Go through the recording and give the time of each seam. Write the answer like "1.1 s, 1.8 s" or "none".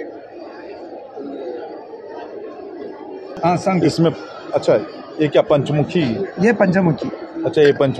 3.4 s